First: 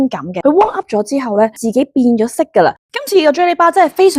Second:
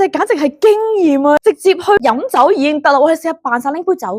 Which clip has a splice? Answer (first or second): first